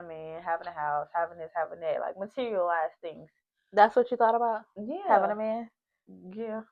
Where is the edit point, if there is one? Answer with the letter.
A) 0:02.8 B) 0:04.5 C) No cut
C